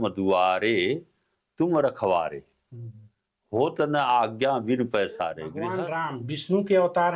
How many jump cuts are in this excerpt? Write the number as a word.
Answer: one